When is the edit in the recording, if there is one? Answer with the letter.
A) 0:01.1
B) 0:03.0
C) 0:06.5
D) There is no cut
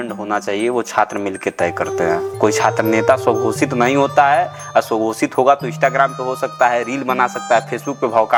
D